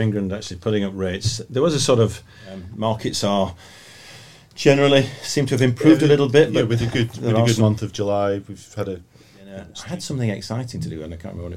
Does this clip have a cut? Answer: yes; 2 cuts; at 2.7 s, 9.7 s

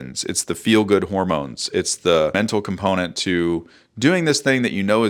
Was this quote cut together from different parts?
no; 0 cuts

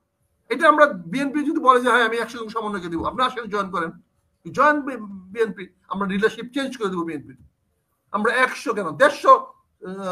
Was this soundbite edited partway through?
no; 0 cuts

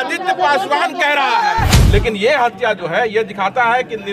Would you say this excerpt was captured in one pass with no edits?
no; 1 cut; at 1.7 s

